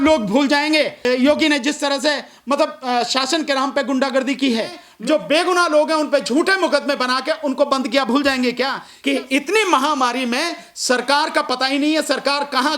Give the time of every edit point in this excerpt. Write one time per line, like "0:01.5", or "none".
0:01.0
0:04.8
0:08.9